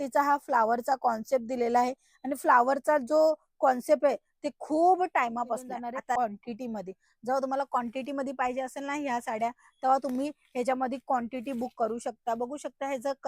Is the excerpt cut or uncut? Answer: cut